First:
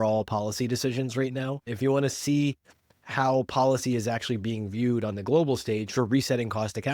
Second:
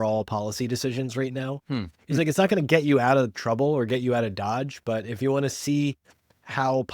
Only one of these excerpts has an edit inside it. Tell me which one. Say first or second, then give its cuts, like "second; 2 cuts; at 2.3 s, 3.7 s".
first; 1 cut; at 1.6 s